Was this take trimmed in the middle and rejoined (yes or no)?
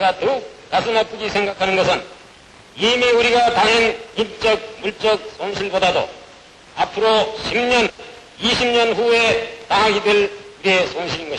no